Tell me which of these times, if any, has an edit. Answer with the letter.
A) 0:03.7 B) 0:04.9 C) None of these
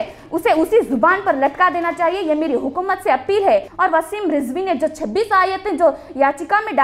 A